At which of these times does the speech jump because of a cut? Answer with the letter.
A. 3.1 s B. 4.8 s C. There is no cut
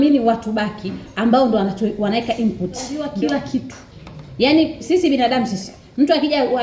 A